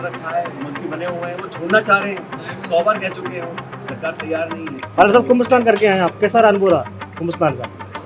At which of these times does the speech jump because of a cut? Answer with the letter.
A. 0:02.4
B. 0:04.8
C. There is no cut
B